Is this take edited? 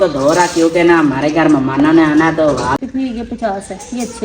yes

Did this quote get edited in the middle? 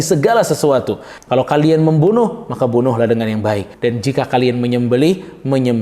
yes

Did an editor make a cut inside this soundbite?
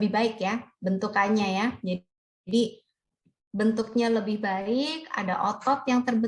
yes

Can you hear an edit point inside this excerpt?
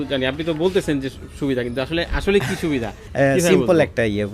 yes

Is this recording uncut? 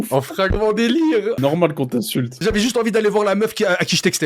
no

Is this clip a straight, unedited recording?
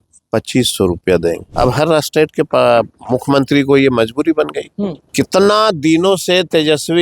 no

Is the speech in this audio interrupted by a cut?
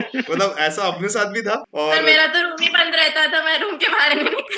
yes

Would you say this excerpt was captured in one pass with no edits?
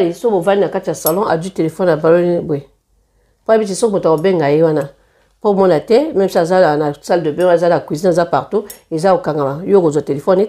yes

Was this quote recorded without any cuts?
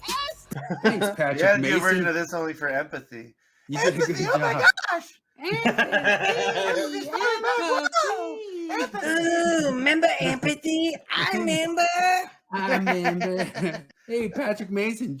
no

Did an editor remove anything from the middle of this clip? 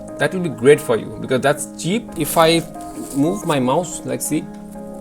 yes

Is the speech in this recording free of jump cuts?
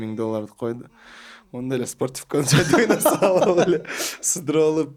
yes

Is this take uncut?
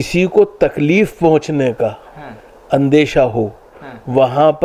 yes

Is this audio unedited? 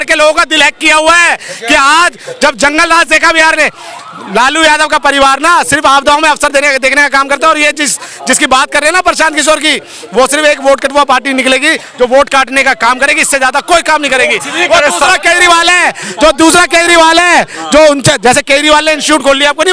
yes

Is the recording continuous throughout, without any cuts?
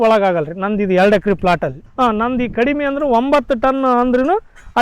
no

